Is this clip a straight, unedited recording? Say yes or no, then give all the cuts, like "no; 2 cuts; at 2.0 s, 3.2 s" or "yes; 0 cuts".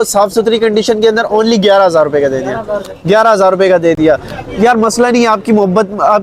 yes; 0 cuts